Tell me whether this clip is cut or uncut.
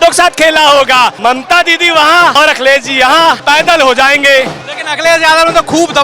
cut